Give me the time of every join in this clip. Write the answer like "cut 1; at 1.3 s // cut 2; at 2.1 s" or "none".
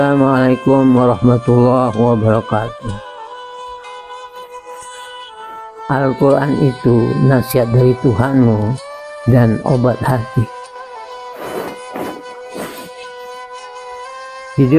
cut 1; at 3.1 s // cut 2; at 5.9 s